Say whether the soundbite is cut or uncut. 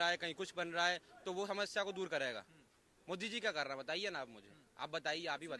uncut